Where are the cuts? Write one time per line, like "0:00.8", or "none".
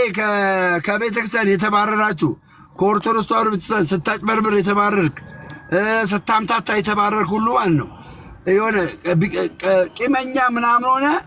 none